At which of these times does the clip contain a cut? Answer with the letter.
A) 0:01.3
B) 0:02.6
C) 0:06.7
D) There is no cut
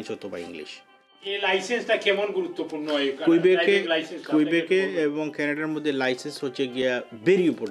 A